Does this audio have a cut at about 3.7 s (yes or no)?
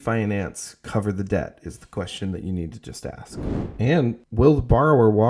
yes